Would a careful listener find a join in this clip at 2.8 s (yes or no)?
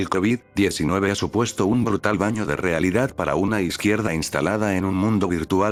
no